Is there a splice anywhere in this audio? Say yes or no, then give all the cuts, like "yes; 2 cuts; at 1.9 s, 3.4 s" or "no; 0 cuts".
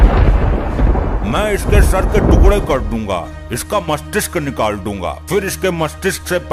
no; 0 cuts